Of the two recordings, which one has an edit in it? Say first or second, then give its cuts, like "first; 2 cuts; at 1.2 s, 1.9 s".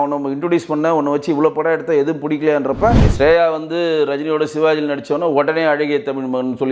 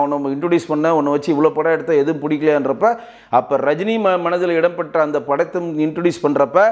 first; 1 cut; at 3.1 s